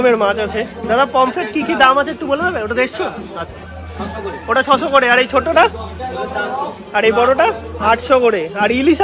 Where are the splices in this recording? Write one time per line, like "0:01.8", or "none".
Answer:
none